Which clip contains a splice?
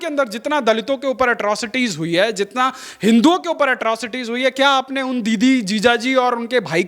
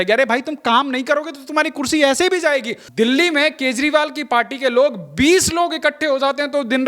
second; 1 cut; at 2.8 s

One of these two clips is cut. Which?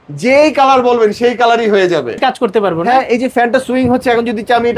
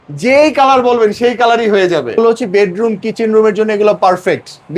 second; 1 cut; at 2.2 s

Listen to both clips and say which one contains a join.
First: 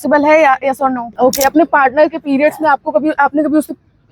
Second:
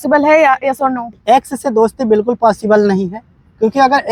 first; 1 cut; at 1.0 s

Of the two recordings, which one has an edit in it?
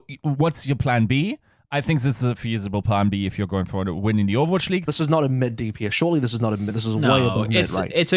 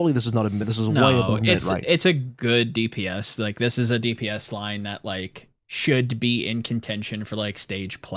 first; 1 cut; at 4.9 s

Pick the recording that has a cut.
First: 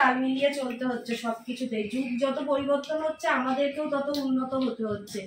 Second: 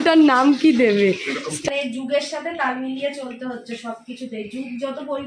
second; 1 cut; at 1.6 s

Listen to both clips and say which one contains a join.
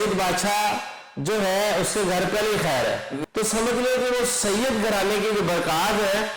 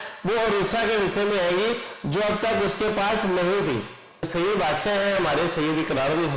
first; 1 cut; at 3.2 s

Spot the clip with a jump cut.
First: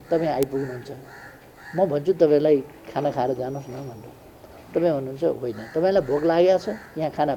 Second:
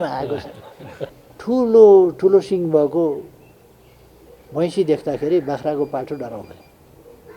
second; 1 cut; at 1.2 s

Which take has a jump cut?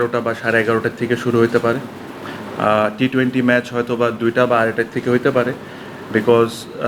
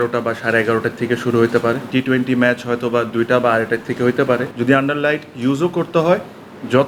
second; 2 cuts; at 1.9 s, 4.5 s

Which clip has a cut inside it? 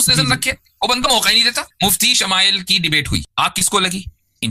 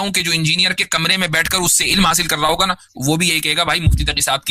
first; 2 cuts; at 1.6 s, 3.3 s

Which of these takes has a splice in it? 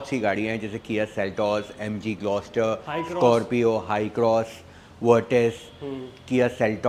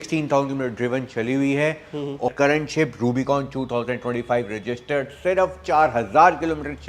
second; 1 cut; at 2.3 s

